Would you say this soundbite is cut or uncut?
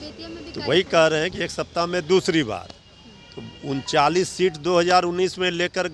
uncut